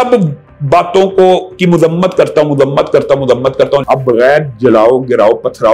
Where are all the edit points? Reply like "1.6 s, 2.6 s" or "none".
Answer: 3.8 s